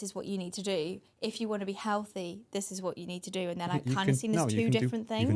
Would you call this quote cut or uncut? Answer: uncut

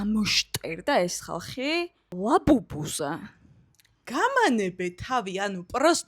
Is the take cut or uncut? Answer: cut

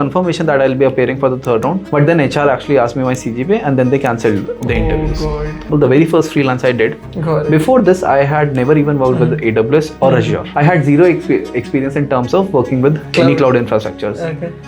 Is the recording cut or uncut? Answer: cut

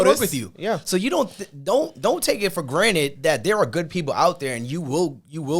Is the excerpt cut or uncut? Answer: uncut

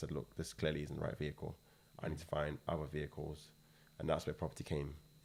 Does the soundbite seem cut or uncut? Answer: uncut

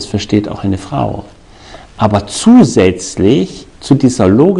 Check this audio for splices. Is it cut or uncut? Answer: uncut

